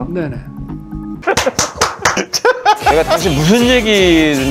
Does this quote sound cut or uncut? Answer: uncut